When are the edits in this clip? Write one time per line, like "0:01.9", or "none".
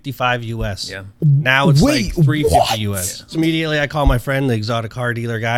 0:03.3